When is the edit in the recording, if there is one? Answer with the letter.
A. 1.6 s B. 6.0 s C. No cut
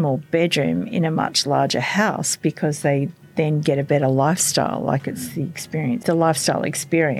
B